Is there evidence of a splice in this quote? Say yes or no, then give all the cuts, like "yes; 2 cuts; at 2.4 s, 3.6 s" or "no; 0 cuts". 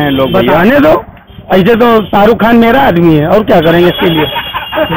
no; 0 cuts